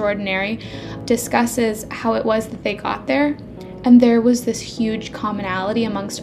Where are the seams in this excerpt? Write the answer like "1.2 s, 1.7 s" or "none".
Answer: 0.9 s